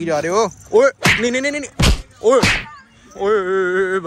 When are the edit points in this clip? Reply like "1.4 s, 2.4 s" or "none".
none